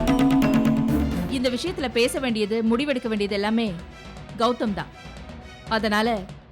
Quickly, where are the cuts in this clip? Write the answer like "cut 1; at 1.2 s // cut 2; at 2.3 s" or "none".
cut 1; at 1.2 s